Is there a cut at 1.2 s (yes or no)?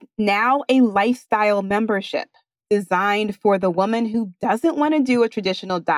no